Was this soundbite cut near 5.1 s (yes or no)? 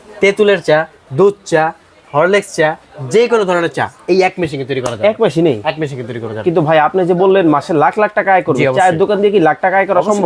no